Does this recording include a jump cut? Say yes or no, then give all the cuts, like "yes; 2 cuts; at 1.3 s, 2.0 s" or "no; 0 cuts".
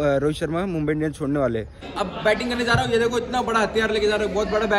yes; 1 cut; at 1.8 s